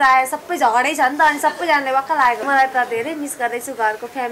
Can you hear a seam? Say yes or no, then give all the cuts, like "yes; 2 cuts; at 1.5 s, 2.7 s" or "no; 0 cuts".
yes; 1 cut; at 2.4 s